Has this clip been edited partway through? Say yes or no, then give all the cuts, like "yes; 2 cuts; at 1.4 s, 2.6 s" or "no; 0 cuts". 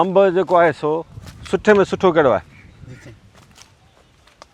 no; 0 cuts